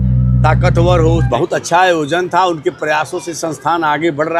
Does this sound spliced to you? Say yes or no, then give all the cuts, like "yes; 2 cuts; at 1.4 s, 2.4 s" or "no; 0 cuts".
yes; 1 cut; at 1.3 s